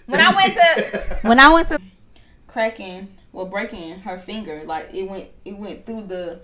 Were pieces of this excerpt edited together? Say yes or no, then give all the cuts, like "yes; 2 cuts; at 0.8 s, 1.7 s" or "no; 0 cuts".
yes; 1 cut; at 1.7 s